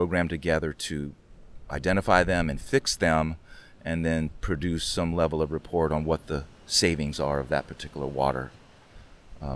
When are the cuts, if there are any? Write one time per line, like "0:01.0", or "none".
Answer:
none